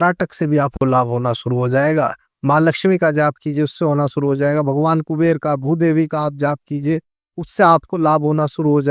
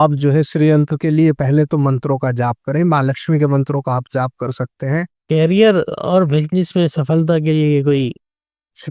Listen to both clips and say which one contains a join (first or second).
second